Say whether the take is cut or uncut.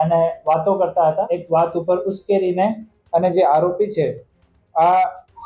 cut